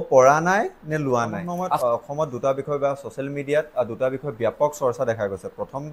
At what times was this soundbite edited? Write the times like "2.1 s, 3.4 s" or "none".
1.8 s